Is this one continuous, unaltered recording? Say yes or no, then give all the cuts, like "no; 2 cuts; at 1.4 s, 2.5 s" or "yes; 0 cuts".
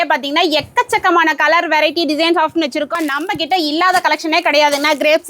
no; 1 cut; at 3.0 s